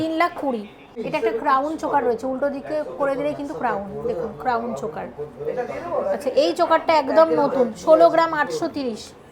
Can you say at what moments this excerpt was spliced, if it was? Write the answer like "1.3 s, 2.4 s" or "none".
0.9 s

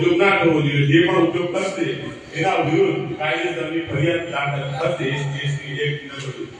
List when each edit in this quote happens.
none

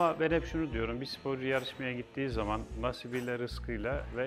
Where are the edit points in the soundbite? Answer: none

